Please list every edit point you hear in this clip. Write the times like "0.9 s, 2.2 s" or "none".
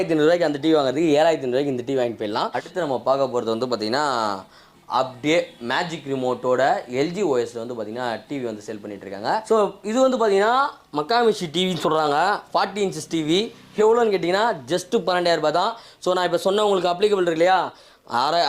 2.6 s, 9.4 s